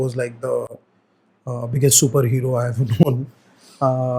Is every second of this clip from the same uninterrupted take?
yes; 0 cuts

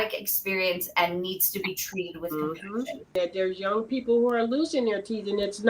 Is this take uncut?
no; 1 cut; at 3.1 s

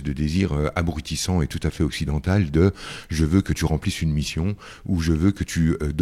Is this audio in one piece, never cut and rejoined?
yes; 0 cuts

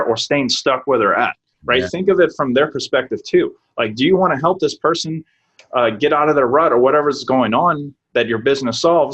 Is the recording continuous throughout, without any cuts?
yes; 0 cuts

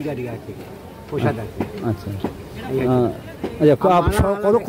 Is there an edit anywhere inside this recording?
no; 0 cuts

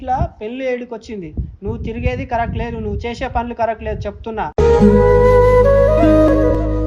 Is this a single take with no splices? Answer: yes; 0 cuts

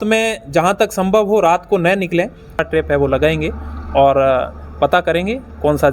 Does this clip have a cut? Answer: yes; 1 cut; at 2.6 s

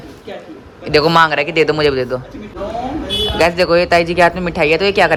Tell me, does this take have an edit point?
no; 0 cuts

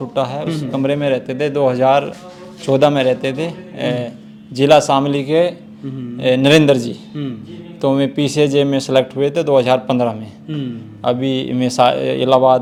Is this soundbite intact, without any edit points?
yes; 0 cuts

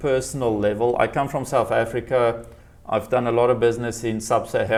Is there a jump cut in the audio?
no; 0 cuts

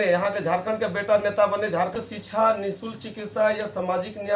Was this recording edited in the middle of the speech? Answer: yes; 1 cut; at 1.9 s

